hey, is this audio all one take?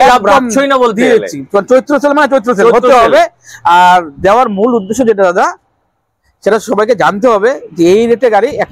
yes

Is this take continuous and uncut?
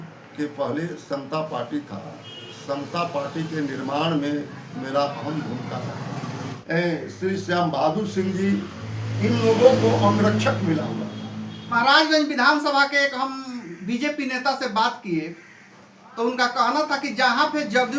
no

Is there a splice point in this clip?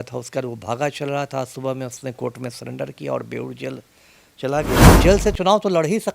yes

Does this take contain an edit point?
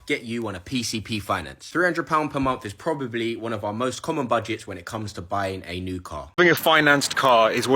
yes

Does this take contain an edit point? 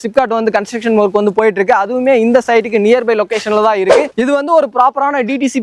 yes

